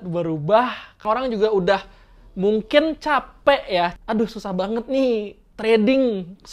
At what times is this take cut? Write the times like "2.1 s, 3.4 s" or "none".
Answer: 1.0 s, 4.0 s